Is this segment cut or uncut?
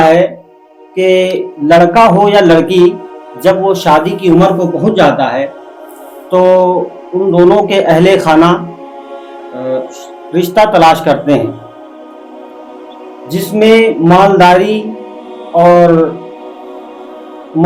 uncut